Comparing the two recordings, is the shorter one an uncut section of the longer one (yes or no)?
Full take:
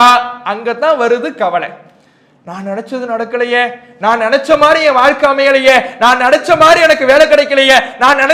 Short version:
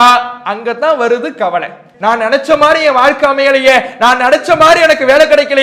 no